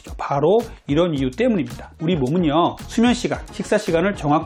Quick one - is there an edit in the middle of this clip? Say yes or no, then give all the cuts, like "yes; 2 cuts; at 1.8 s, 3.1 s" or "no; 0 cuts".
no; 0 cuts